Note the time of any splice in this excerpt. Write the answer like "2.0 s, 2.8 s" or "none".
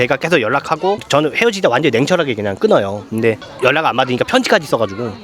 1.0 s, 3.4 s